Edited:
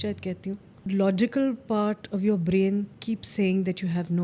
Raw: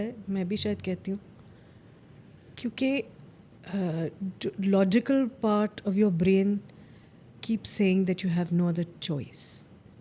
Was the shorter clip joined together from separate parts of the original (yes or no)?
yes